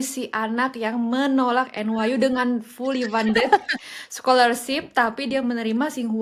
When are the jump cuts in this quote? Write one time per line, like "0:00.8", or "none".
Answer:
none

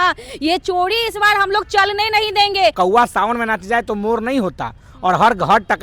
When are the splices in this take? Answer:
0:02.7

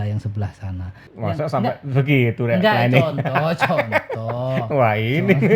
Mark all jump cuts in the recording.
0:01.1

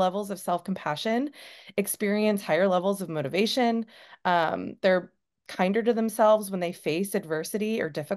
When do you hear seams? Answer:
none

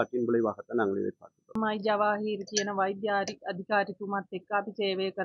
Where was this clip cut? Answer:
0:01.5

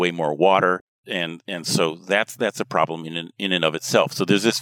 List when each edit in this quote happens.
0:00.9

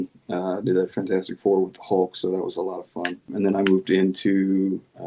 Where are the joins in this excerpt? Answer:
0:03.3

